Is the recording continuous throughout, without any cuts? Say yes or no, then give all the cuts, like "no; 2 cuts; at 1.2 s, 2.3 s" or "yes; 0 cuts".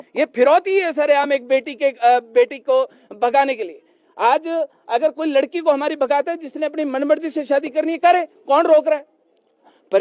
yes; 0 cuts